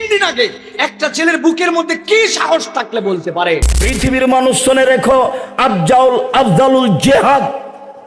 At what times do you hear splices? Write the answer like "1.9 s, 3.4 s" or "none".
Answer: 3.8 s